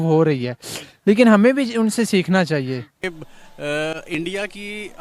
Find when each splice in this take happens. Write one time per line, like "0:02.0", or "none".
0:03.2